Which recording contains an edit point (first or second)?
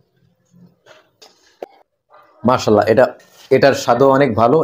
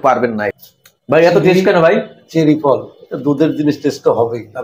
first